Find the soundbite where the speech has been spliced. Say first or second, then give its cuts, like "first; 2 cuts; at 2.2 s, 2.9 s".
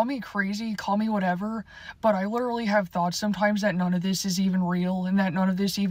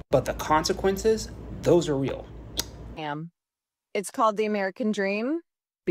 second; 1 cut; at 3.0 s